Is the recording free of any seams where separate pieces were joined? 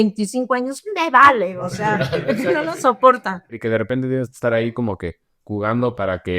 no; 1 cut; at 3.5 s

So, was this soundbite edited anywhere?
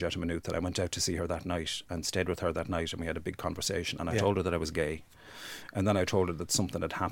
no; 0 cuts

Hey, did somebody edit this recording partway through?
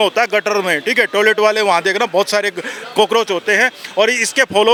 no; 0 cuts

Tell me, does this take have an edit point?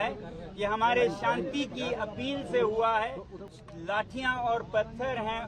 yes; 1 cut; at 3.6 s

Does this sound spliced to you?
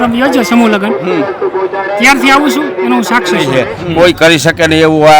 yes; 1 cut; at 3.7 s

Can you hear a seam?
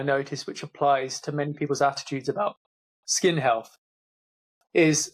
no; 0 cuts

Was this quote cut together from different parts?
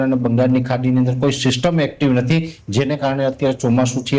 no; 0 cuts

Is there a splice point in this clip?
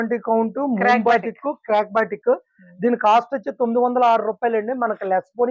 no; 0 cuts

